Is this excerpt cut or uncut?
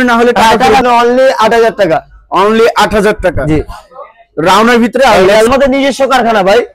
cut